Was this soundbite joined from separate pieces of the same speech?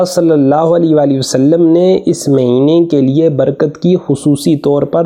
no; 0 cuts

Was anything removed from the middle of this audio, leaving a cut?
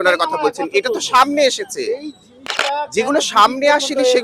no; 0 cuts

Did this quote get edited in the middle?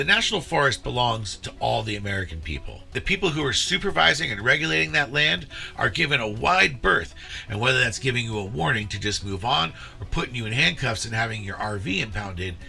yes; 2 cuts; at 3.0 s, 7.2 s

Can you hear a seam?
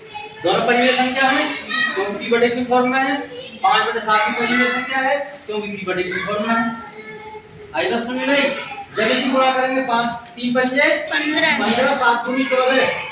no; 0 cuts

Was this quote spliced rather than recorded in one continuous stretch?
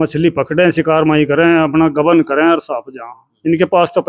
no; 0 cuts

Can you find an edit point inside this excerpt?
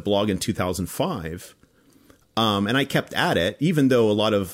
no; 0 cuts

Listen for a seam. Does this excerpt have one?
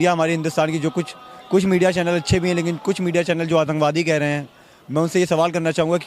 no; 0 cuts

